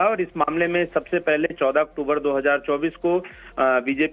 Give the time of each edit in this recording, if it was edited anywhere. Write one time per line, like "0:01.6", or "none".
0:02.0